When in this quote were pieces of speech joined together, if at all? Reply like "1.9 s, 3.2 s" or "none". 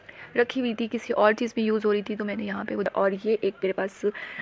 2.9 s